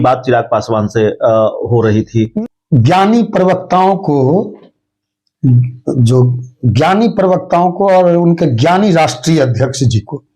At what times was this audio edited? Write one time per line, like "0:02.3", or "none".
0:02.3